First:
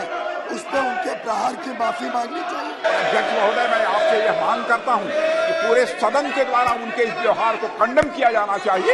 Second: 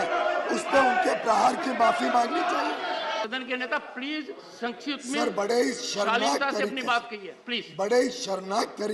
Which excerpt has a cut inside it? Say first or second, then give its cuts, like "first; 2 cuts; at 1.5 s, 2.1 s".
first; 1 cut; at 2.8 s